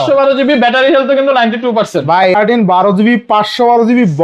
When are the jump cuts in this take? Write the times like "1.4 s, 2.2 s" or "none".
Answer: 2.2 s